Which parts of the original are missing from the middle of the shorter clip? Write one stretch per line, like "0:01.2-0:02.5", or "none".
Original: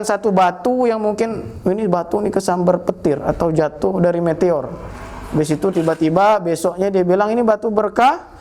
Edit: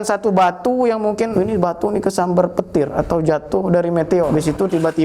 0:01.3-0:01.6
0:04.6-0:05.3